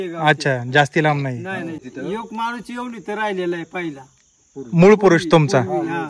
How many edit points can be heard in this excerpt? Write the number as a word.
one